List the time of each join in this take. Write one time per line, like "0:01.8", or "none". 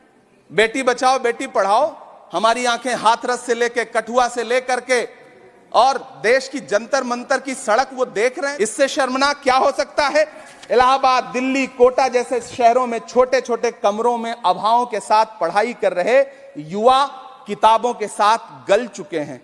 0:10.4